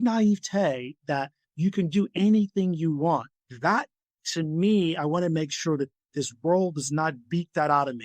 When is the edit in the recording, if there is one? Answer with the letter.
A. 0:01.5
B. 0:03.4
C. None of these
B